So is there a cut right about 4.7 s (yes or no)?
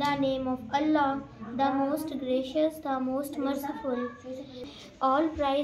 yes